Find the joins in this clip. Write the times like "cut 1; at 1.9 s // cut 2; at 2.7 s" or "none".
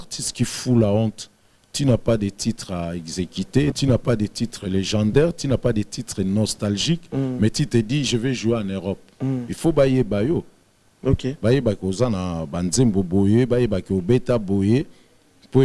cut 1; at 3.8 s

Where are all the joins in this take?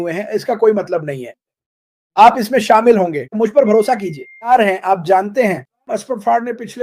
cut 1; at 4.5 s

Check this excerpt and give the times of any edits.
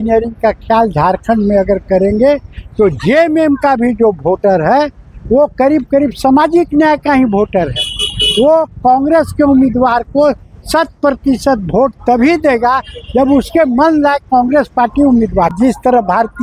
cut 1; at 15.5 s

